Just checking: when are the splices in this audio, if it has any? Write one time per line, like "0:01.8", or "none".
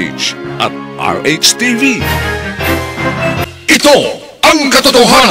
0:03.4